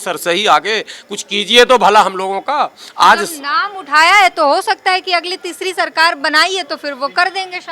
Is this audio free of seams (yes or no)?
yes